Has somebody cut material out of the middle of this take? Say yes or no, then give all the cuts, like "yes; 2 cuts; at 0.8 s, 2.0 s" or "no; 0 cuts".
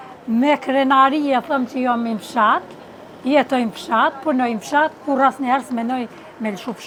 no; 0 cuts